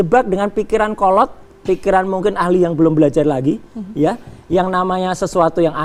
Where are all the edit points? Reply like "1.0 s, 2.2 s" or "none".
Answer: none